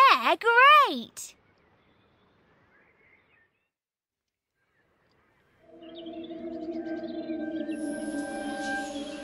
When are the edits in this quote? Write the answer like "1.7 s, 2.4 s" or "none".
none